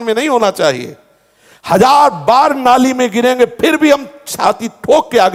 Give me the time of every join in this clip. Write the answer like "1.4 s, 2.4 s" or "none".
none